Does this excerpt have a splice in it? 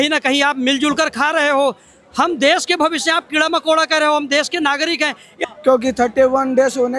yes; 1 cut; at 5.4 s

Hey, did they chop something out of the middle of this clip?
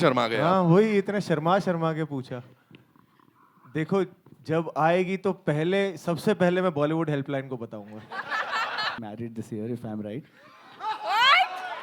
yes; 1 cut; at 9.0 s

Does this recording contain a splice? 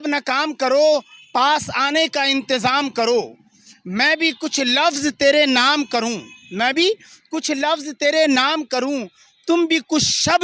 no; 0 cuts

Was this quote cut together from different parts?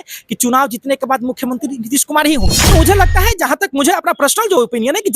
yes; 1 cut; at 2.7 s

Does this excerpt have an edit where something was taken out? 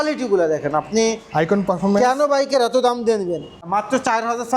yes; 1 cut; at 3.5 s

